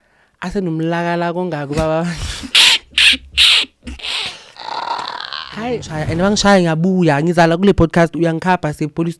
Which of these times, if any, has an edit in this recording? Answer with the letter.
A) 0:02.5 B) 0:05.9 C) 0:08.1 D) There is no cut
B